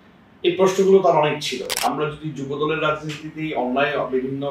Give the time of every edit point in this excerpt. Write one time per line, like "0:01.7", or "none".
0:01.6